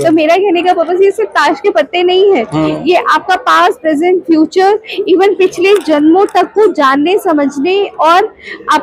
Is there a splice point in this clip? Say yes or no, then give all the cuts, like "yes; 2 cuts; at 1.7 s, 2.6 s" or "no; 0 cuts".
no; 0 cuts